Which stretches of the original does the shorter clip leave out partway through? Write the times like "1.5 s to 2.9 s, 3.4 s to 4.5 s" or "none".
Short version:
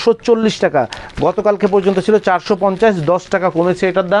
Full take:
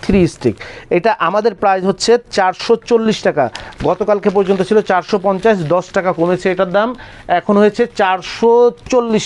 none